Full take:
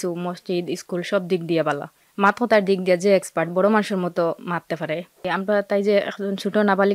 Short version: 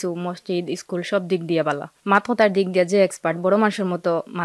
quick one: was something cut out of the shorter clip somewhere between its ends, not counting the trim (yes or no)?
yes